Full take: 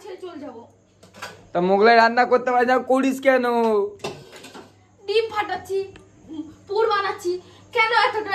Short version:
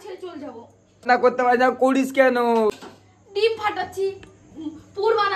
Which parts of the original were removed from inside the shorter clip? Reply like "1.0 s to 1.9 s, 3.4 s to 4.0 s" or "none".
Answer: 1.0 s to 2.1 s, 3.8 s to 4.4 s

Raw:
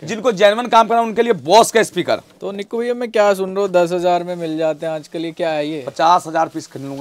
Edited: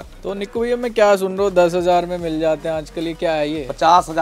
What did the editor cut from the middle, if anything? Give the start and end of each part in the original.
none

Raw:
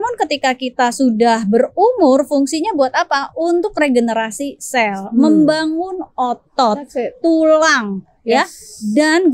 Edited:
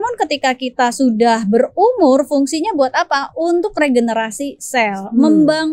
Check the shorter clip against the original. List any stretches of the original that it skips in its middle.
none

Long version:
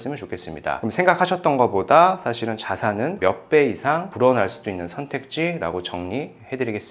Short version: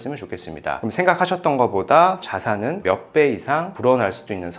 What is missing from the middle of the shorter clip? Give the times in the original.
2.2 s to 2.6 s

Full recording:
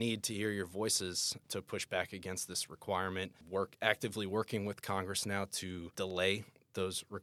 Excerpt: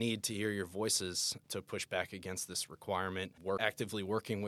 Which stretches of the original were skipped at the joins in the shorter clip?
3.5 s to 3.7 s

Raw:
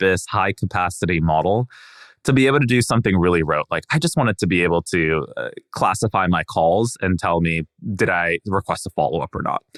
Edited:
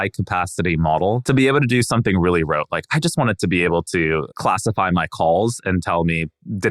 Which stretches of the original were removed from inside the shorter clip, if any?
1.6 s to 2.2 s, 5.3 s to 5.7 s

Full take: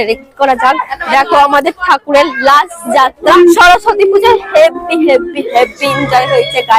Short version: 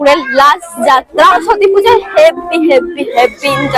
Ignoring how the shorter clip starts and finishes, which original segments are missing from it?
3.4 s to 3.7 s

